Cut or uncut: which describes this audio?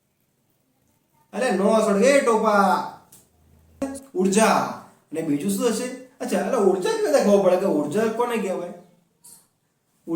cut